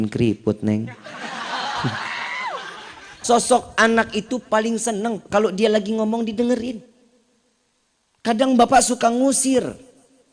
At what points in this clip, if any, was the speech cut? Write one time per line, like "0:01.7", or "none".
0:03.1